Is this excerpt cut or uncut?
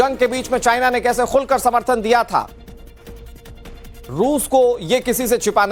uncut